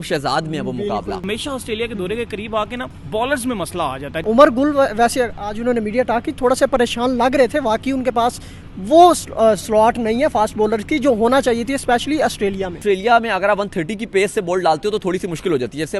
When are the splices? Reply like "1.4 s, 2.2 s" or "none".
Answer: 1.2 s, 2.9 s, 4.1 s, 12.8 s